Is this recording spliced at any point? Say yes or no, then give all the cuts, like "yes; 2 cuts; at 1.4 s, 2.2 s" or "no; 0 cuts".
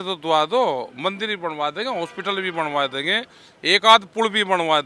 no; 0 cuts